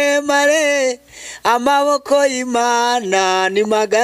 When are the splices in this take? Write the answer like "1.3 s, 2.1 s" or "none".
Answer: none